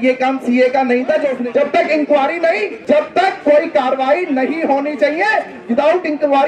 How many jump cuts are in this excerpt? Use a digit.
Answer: 2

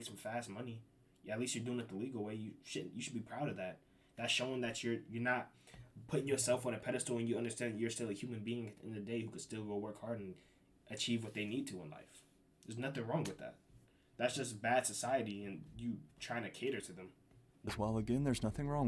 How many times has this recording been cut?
1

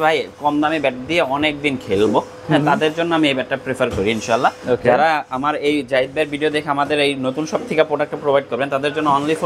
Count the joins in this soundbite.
0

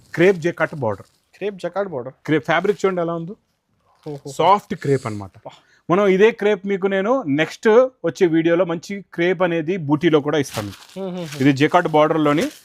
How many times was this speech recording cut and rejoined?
0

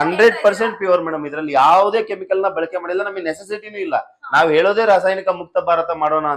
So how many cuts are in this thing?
0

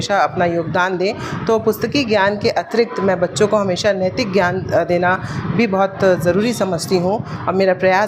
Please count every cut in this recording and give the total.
0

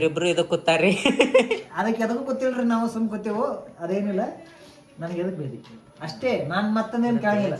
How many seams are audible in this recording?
0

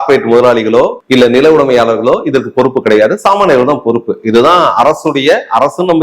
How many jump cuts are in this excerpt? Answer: 1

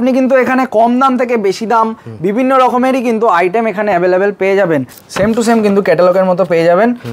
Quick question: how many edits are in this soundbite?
1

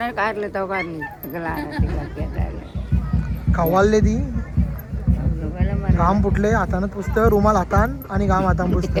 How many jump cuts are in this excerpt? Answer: 0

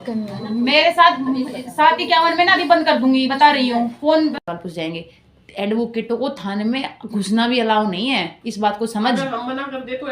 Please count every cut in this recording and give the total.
1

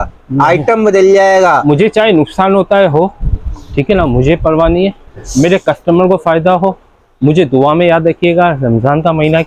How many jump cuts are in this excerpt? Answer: 0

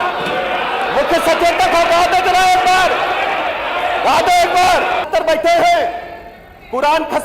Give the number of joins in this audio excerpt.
1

